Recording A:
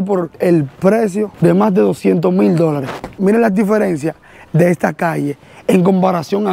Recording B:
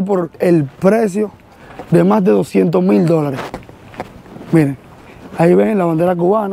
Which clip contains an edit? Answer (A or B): A